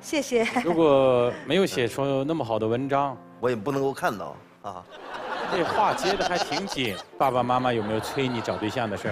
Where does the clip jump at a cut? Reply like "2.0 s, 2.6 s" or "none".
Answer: 5.5 s, 7.0 s